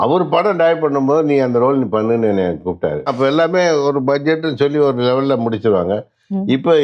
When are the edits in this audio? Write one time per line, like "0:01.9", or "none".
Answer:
0:03.1